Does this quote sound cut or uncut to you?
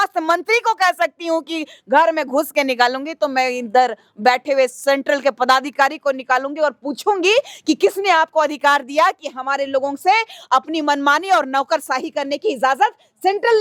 uncut